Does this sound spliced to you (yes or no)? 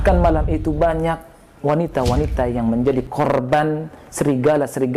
no